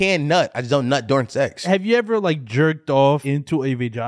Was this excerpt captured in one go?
no; 2 cuts; at 1.6 s, 3.2 s

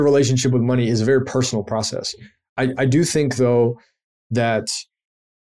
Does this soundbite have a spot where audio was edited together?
no; 0 cuts

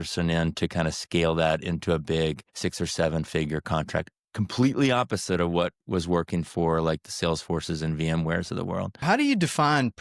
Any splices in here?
yes; 1 cut; at 8.9 s

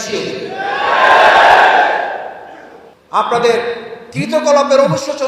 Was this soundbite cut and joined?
yes; 1 cut; at 2.9 s

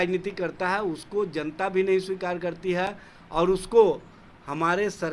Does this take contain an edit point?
no; 0 cuts

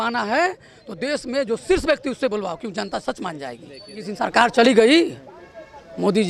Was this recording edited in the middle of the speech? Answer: yes; 1 cut; at 3.9 s

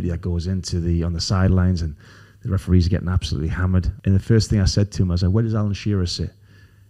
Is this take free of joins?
no; 1 cut; at 3.9 s

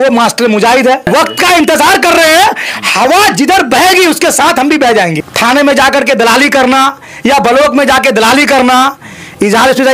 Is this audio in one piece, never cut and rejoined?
no; 2 cuts; at 1.0 s, 5.2 s

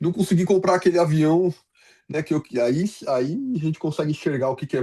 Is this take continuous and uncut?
yes; 0 cuts

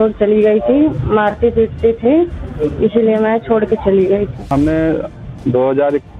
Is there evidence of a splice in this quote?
yes; 1 cut; at 4.5 s

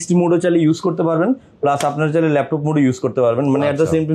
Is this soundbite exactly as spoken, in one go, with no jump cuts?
yes; 0 cuts

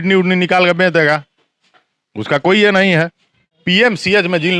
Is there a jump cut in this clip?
yes; 1 cut; at 3.5 s

